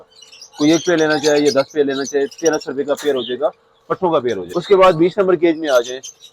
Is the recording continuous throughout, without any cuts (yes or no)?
no